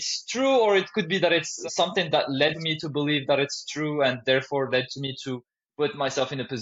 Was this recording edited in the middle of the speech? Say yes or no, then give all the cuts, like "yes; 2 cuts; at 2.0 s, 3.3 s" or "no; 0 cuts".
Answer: yes; 2 cuts; at 1.6 s, 2.6 s